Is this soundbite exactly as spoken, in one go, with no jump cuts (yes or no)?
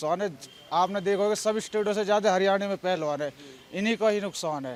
yes